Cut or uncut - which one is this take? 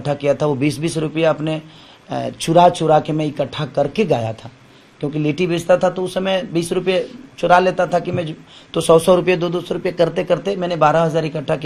uncut